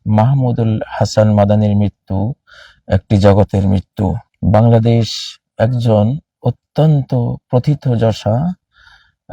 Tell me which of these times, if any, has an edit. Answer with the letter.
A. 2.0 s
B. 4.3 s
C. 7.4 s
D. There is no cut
B